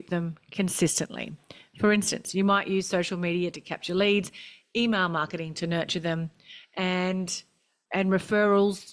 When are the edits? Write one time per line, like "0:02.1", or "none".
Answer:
0:07.9